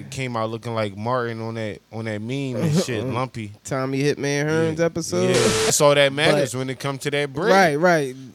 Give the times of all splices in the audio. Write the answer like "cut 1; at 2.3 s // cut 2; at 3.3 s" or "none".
cut 1; at 5.7 s